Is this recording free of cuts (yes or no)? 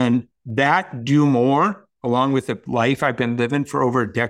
no